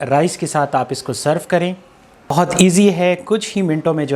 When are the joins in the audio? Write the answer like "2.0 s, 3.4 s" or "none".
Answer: 2.3 s